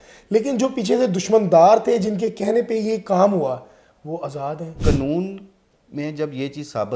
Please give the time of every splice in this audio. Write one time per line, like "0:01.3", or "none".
0:04.8